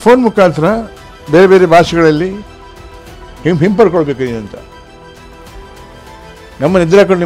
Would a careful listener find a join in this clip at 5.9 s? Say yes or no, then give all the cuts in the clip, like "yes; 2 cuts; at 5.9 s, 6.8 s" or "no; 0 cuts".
no; 0 cuts